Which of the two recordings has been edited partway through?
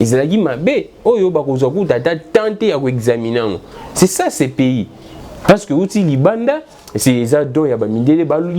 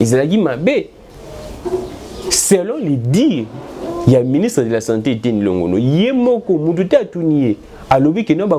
first; 1 cut; at 1.0 s

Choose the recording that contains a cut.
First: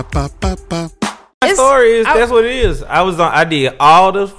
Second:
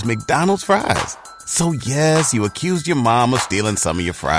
first; 1 cut; at 1.4 s

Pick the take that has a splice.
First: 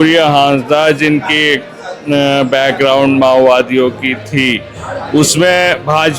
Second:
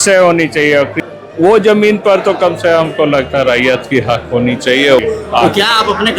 second; 2 cuts; at 1.0 s, 5.0 s

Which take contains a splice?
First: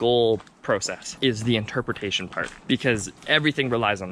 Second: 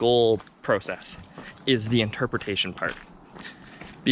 first; 3 cuts; at 1.0 s, 2.5 s, 3.1 s

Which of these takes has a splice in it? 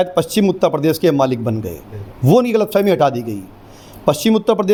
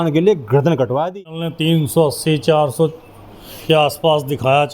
second; 1 cut; at 1.5 s

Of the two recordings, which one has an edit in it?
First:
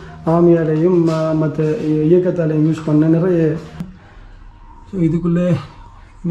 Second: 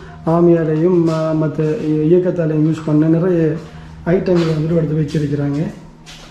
first; 1 cut; at 3.9 s

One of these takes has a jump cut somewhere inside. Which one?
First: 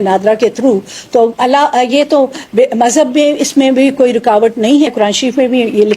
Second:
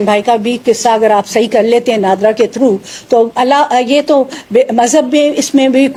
first; 1 cut; at 4.9 s

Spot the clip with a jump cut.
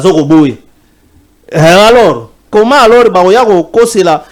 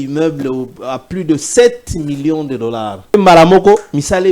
second; 1 cut; at 3.1 s

